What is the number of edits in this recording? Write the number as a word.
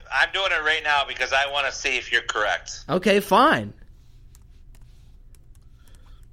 zero